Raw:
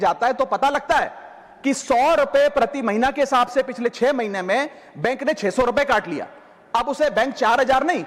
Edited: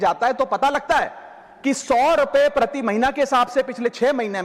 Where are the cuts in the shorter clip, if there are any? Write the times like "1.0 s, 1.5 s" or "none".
none